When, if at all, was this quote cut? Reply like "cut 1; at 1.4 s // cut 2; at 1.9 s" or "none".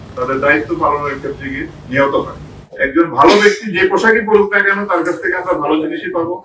cut 1; at 2.6 s